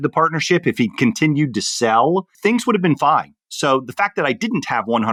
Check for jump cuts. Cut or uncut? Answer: uncut